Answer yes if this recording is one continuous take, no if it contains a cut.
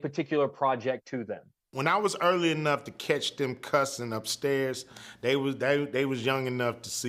no